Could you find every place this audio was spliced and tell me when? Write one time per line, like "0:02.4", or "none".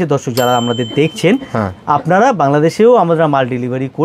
none